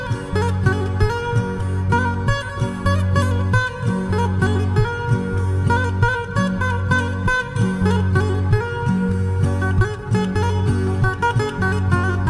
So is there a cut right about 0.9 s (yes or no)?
no